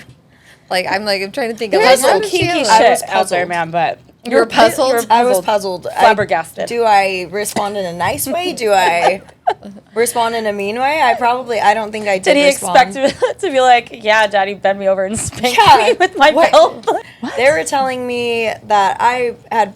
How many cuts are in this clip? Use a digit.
1